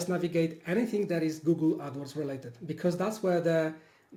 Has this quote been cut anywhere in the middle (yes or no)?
no